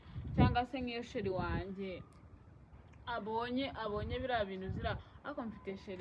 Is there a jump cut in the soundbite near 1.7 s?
no; 0 cuts

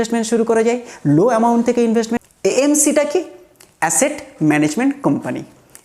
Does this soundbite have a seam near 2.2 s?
yes; 1 cut; at 2.2 s

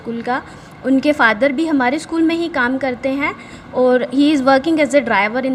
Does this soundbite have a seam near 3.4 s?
no; 0 cuts

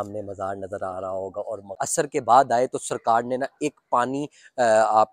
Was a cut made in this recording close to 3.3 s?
no; 1 cut; at 1.8 s

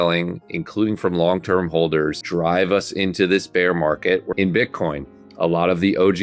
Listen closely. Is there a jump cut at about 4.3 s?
yes; 2 cuts; at 2.2 s, 4.3 s

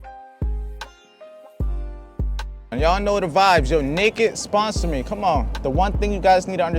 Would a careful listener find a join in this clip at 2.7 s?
yes; 2 cuts; at 2.7 s, 5.5 s

